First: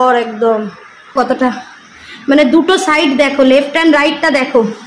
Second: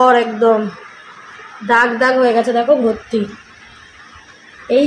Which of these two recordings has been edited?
first; 1 cut; at 1.1 s

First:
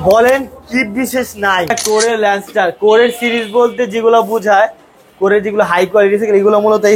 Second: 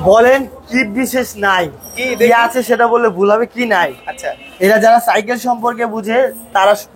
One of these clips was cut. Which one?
first; 1 cut; at 1.8 s

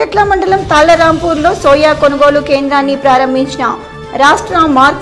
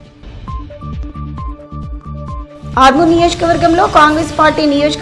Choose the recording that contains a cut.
second; 1 cut; at 0.9 s

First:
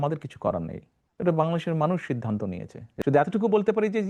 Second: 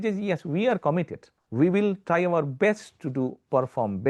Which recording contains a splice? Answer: first; 1 cut; at 2.9 s

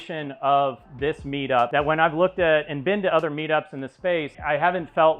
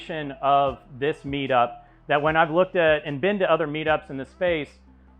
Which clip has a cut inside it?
first; 2 cuts; at 1.7 s, 4.4 s

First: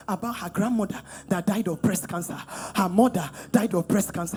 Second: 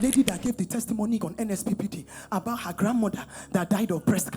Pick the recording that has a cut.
second; 1 cut; at 1.2 s

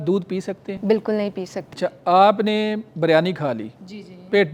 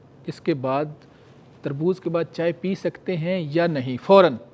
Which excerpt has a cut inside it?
first; 1 cut; at 1.6 s

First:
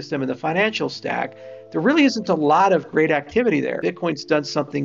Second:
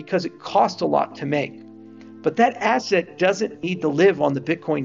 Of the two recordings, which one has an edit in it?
first; 1 cut; at 3.8 s

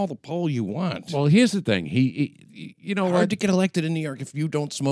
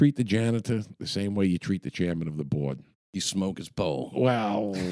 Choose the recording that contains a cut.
first; 1 cut; at 1.0 s

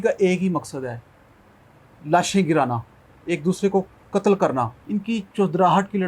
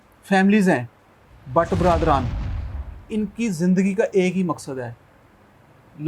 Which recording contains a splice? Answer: first; 1 cut; at 4.8 s

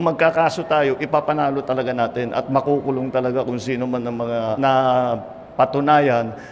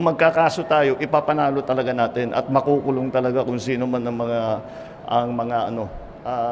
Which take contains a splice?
first; 1 cut; at 4.6 s

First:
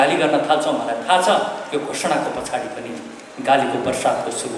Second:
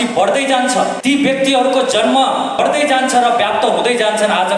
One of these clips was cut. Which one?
second; 2 cuts; at 1.0 s, 2.6 s

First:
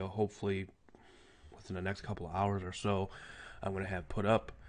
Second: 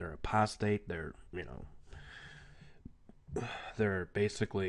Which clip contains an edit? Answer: second; 1 cut; at 1.0 s

